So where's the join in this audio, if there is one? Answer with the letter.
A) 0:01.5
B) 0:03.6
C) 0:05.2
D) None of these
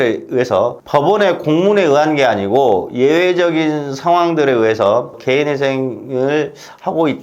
C